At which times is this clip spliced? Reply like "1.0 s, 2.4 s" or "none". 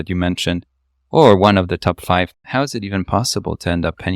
2.4 s